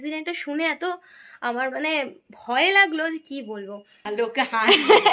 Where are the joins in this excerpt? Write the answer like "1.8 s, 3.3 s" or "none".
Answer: 4.0 s